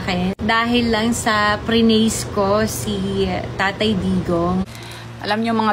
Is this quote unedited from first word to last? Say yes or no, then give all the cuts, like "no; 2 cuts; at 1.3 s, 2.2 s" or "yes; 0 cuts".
no; 1 cut; at 4.7 s